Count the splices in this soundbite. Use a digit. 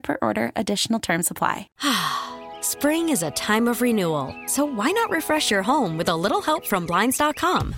1